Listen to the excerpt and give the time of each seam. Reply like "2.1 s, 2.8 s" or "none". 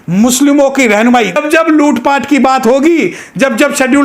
1.4 s